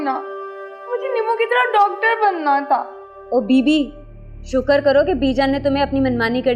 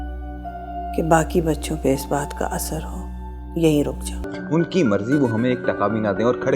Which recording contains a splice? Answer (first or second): second